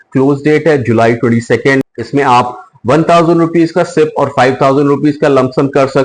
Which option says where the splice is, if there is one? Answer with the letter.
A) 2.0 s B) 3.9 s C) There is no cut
A